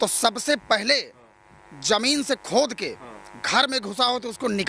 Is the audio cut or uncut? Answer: uncut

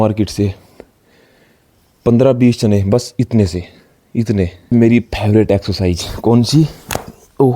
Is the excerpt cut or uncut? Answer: cut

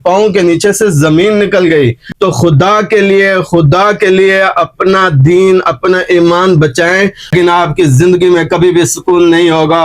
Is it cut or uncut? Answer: cut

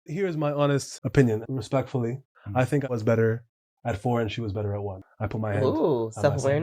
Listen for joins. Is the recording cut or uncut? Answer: cut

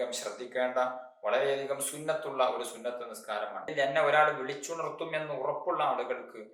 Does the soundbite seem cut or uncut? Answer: cut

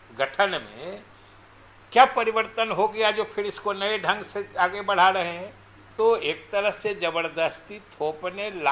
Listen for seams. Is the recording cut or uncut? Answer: cut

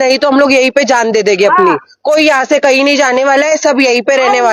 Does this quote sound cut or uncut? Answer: uncut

